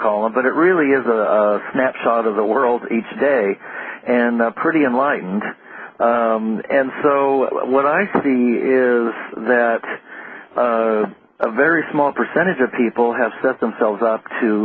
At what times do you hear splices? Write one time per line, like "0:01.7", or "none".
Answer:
0:12.3